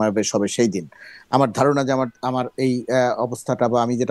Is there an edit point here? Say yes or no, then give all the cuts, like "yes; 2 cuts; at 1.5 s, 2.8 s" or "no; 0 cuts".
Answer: no; 0 cuts